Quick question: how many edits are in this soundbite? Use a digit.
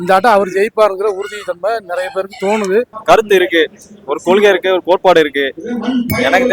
1